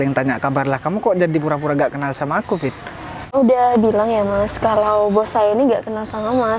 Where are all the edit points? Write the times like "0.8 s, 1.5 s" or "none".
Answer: 3.3 s